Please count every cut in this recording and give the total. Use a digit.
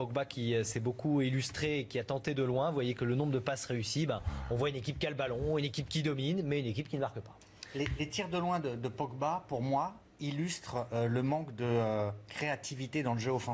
1